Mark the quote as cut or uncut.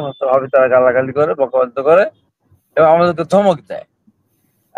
uncut